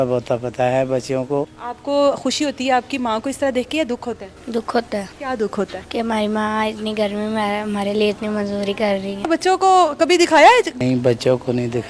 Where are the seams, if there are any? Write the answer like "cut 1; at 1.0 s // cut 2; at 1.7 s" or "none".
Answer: cut 1; at 1.6 s // cut 2; at 5.1 s // cut 3; at 5.8 s // cut 4; at 9.3 s // cut 5; at 10.7 s

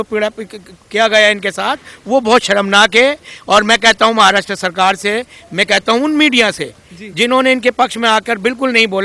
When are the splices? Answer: none

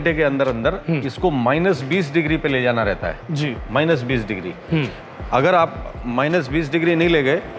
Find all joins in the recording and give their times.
none

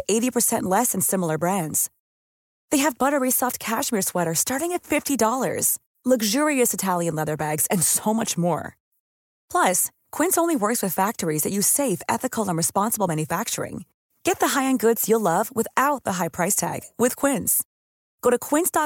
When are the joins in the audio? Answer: none

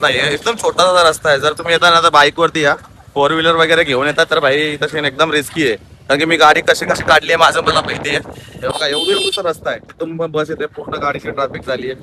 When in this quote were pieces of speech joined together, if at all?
none

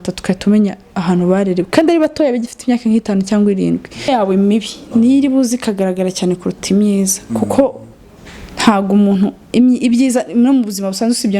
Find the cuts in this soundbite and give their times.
cut 1; at 4.1 s

